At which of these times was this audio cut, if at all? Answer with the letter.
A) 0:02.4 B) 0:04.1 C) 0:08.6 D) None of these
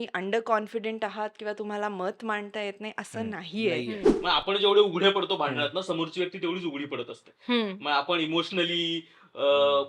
B